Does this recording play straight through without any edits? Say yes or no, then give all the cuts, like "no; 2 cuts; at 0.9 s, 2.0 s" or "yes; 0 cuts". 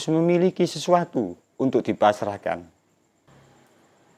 no; 1 cut; at 3.3 s